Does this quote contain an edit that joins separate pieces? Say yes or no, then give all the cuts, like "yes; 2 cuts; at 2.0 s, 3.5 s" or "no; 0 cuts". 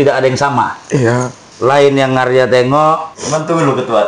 yes; 2 cuts; at 1.4 s, 3.1 s